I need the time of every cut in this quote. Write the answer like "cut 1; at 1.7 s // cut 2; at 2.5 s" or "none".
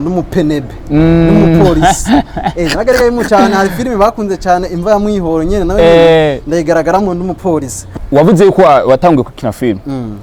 cut 1; at 7.8 s